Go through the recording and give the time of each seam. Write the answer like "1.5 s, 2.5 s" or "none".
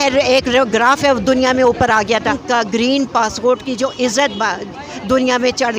2.4 s